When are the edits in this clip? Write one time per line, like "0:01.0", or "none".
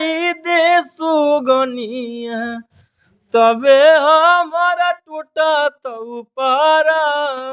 none

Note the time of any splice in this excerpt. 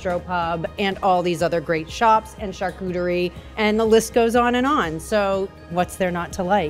0:03.4
0:05.7

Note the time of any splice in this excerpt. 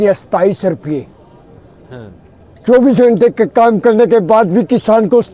none

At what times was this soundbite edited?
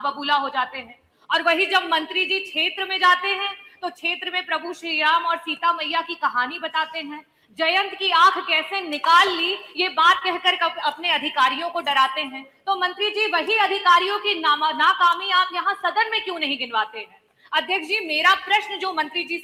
none

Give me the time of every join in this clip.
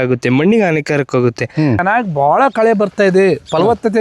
0:01.8

